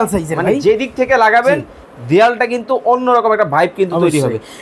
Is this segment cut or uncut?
uncut